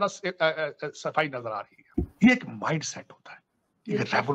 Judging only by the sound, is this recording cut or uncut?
cut